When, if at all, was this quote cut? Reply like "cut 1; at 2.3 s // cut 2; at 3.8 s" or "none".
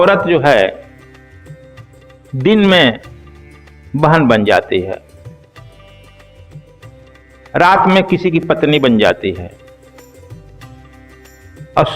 cut 1; at 0.9 s // cut 2; at 2.3 s // cut 3; at 5.0 s // cut 4; at 7.2 s